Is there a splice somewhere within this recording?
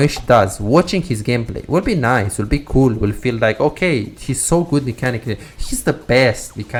no; 0 cuts

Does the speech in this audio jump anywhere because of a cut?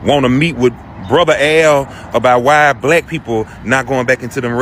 no; 0 cuts

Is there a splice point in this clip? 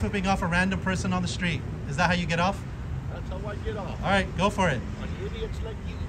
no; 0 cuts

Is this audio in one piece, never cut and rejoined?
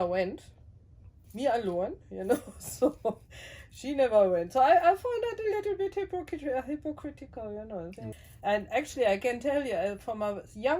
no; 1 cut; at 8.1 s

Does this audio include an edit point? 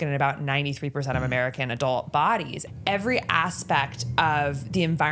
yes; 1 cut; at 2.6 s

